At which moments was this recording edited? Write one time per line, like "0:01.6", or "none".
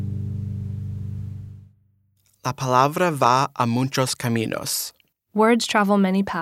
none

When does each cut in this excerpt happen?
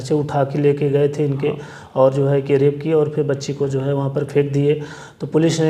none

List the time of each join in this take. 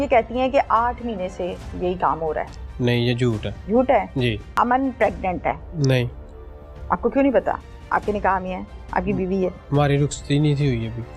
0:03.5
0:04.5
0:05.7

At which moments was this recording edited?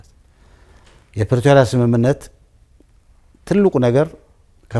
none

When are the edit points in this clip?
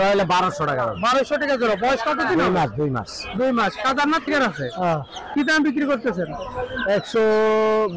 0:04.3

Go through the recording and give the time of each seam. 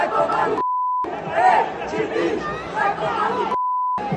none

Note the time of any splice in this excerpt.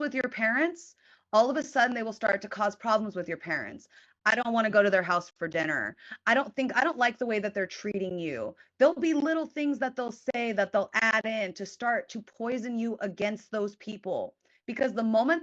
none

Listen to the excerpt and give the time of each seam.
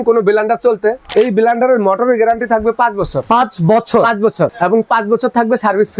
0:01.0
0:03.2
0:04.5

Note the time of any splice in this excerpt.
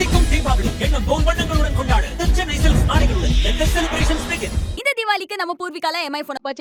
none

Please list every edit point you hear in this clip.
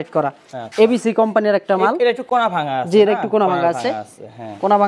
none

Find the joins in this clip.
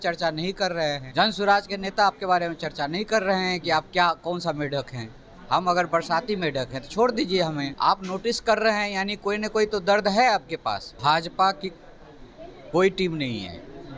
0:01.0
0:07.7
0:10.9

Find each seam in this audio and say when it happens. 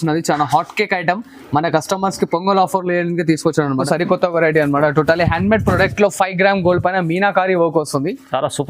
0:03.8

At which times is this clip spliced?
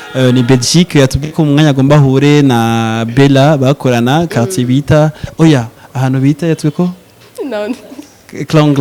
none

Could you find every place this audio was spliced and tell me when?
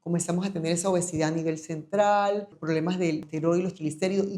0:02.8

